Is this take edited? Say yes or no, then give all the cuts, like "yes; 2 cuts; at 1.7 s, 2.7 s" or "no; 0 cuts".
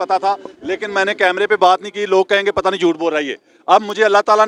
no; 0 cuts